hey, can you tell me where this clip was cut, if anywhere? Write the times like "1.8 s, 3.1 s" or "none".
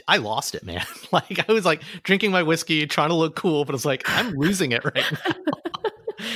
none